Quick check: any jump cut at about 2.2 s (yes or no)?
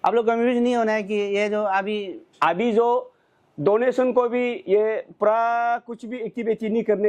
yes